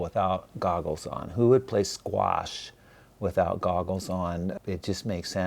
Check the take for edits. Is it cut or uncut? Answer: cut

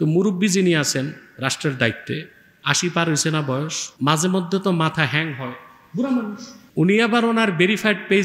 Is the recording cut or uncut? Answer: cut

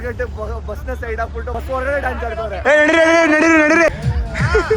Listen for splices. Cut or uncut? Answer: cut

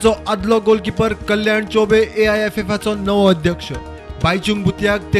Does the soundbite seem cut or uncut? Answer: uncut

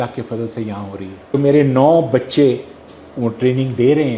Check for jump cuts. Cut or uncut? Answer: cut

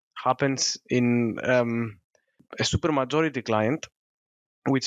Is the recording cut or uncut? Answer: uncut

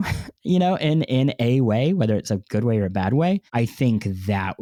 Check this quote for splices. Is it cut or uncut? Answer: uncut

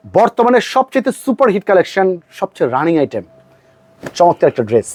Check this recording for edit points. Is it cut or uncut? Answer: uncut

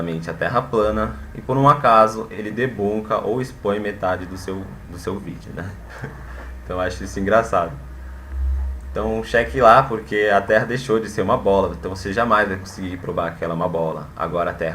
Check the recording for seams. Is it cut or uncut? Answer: cut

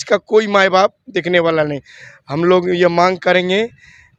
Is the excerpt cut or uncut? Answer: uncut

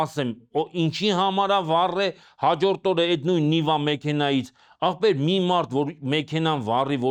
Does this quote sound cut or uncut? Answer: uncut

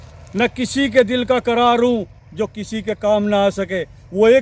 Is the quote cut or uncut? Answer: uncut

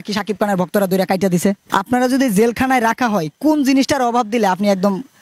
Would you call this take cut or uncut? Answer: cut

